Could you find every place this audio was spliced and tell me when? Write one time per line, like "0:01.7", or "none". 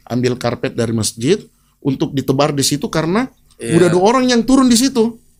none